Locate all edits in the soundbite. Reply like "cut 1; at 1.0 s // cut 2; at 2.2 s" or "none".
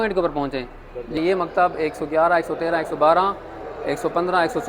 cut 1; at 1.2 s